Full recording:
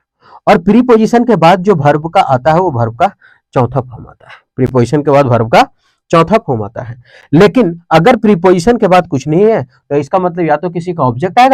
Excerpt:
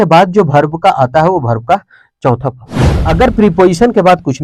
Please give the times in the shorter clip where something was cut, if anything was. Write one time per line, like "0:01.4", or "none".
0:03.0